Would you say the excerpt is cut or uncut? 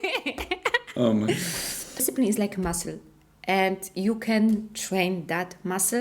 cut